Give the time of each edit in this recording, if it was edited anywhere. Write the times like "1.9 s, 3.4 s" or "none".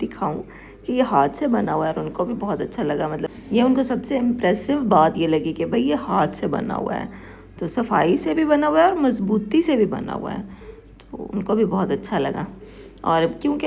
none